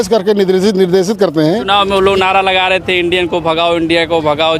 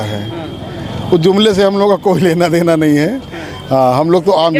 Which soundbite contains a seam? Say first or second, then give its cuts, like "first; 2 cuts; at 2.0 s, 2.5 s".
first; 1 cut; at 1.6 s